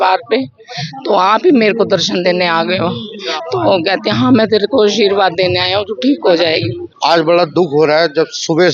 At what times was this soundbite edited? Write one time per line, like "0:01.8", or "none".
0:06.8